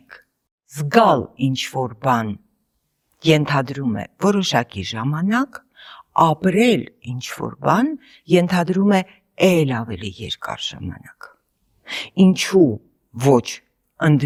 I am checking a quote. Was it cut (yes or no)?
no